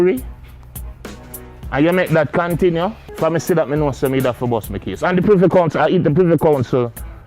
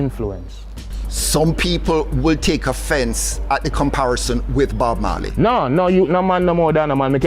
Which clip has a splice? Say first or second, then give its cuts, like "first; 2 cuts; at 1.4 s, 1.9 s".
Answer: first; 1 cut; at 3.0 s